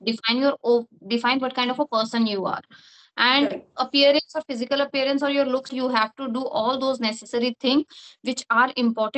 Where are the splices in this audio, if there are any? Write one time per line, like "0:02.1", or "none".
0:05.7